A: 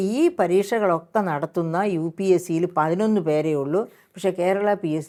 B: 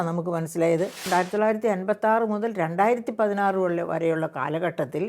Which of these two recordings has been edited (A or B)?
B